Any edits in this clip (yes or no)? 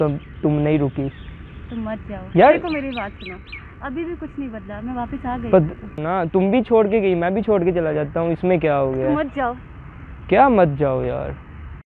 yes